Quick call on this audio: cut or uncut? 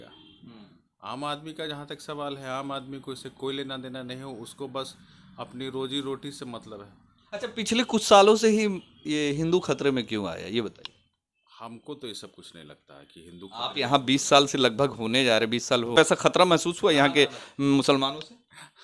uncut